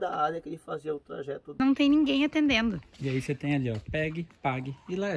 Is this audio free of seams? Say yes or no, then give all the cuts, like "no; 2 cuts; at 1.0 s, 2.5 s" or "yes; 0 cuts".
no; 1 cut; at 1.6 s